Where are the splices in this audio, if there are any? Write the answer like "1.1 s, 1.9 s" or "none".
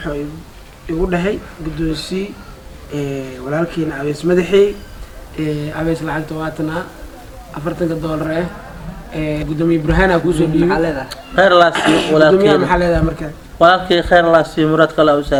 none